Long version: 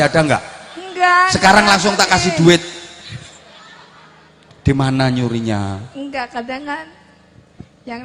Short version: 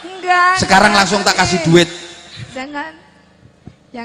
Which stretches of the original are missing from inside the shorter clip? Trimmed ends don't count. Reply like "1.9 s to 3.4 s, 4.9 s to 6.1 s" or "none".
3.3 s to 6.5 s